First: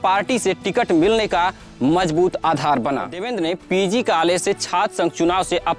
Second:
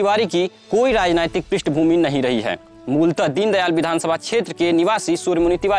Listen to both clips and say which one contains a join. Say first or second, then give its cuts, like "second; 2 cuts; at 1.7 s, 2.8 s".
first; 1 cut; at 3.2 s